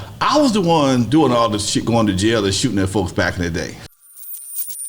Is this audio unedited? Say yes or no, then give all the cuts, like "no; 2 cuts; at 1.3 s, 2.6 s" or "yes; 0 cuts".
no; 1 cut; at 3.8 s